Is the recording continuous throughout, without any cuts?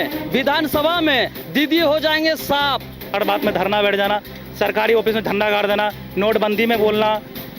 no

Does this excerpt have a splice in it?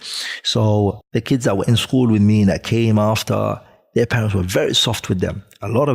yes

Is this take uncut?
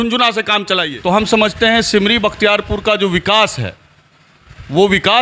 no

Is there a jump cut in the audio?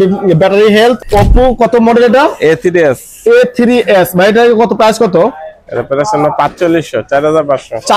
yes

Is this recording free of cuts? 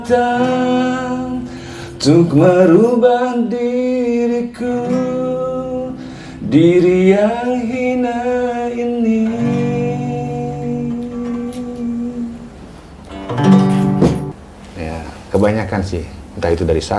no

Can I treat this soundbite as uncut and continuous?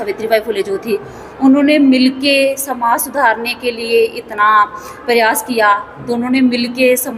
yes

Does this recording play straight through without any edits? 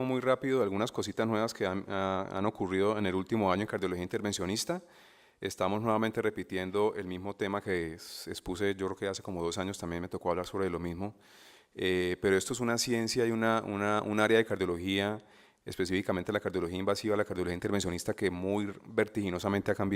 no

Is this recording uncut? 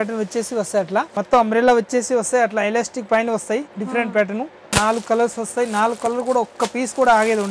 no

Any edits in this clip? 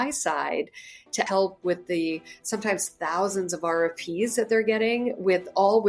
yes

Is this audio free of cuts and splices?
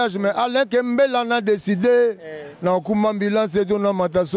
yes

